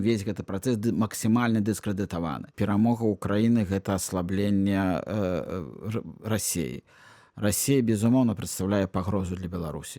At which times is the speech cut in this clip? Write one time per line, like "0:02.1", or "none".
0:02.5